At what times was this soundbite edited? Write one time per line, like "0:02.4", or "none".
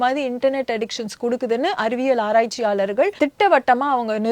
0:03.1